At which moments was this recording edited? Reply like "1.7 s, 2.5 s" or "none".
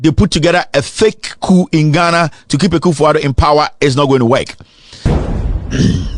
5.0 s